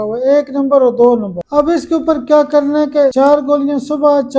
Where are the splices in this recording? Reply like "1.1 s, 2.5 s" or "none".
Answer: 1.4 s, 3.1 s